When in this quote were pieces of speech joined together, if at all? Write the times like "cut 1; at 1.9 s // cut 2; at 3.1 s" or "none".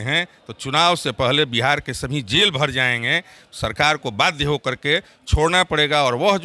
none